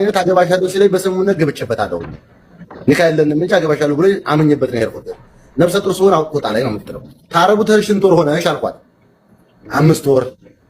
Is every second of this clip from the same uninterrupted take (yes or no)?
yes